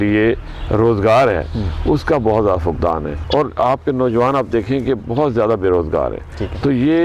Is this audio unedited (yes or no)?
yes